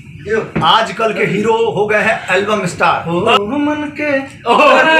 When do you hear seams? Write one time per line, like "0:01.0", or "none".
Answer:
0:03.0